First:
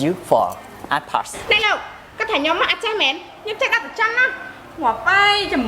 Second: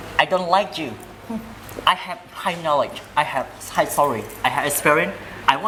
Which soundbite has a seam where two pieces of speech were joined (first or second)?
first